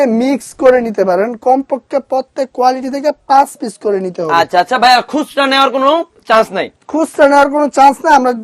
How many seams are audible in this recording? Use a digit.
0